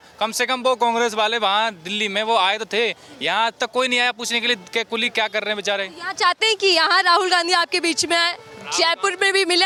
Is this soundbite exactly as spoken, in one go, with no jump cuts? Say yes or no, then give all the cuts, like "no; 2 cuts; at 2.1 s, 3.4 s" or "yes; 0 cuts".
yes; 0 cuts